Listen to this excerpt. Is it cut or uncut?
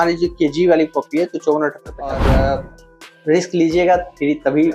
cut